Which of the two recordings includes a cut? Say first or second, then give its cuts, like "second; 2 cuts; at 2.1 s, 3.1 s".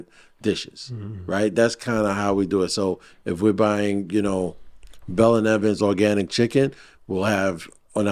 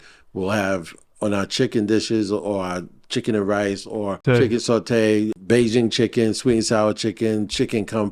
second; 2 cuts; at 4.2 s, 5.4 s